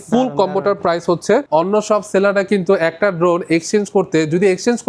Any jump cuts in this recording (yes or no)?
yes